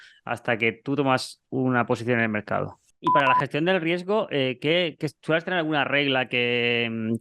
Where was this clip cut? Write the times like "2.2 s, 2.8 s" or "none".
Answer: 2.9 s